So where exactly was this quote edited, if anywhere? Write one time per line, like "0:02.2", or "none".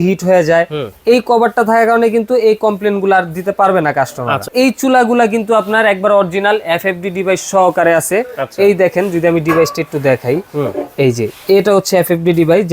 0:04.5